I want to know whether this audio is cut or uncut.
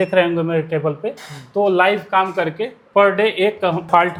uncut